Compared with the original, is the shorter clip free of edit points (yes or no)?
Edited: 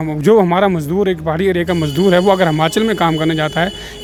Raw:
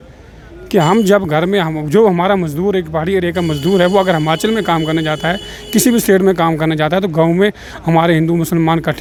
yes